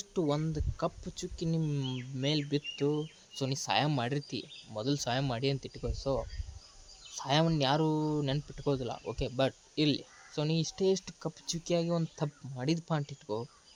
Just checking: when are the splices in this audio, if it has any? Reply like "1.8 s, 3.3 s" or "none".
none